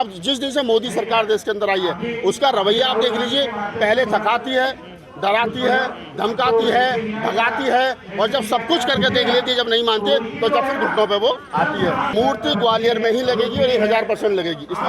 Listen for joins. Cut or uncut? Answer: cut